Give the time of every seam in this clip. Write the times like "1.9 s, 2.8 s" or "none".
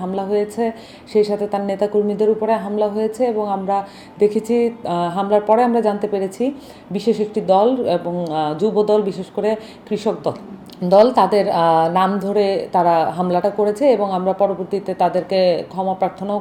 none